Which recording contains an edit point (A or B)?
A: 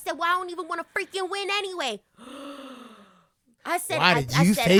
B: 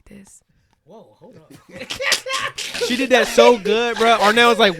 B